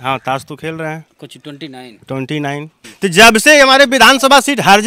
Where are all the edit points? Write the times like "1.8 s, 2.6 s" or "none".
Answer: 2.9 s